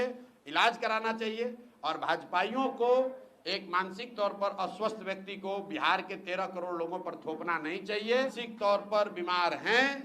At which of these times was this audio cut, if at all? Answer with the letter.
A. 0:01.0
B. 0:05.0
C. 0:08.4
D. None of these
C